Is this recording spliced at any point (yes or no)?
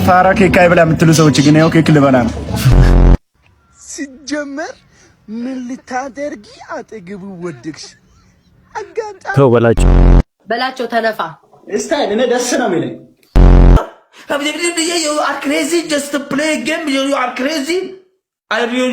yes